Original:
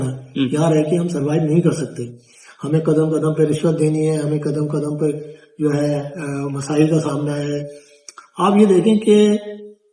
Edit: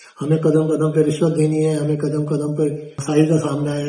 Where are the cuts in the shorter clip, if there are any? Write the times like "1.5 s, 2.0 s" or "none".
3.0 s